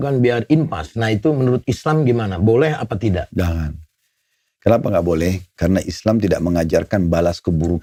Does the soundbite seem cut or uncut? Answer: uncut